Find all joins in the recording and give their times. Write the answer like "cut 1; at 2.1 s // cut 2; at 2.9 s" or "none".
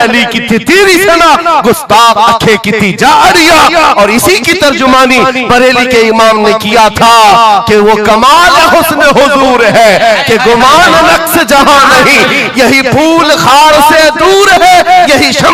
none